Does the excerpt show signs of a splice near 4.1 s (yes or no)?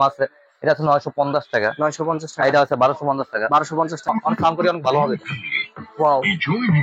yes